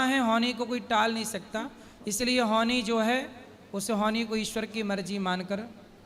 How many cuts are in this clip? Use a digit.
0